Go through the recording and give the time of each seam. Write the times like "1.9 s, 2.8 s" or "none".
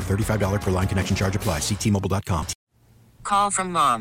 2.6 s